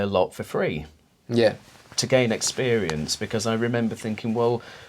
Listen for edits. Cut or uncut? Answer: uncut